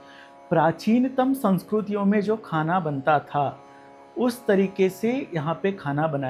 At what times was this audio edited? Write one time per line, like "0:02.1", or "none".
none